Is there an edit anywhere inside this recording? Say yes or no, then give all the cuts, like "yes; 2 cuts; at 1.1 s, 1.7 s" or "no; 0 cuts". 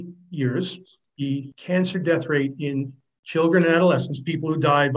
yes; 1 cut; at 1.2 s